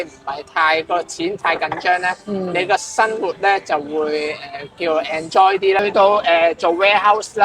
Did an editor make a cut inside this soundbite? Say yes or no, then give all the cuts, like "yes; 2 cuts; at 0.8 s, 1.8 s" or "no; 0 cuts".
yes; 1 cut; at 5.8 s